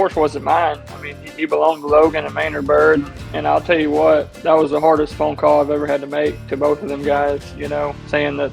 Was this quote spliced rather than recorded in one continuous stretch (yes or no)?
yes